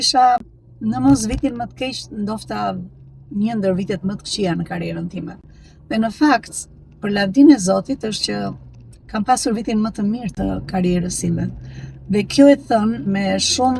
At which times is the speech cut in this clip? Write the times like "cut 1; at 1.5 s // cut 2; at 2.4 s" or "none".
none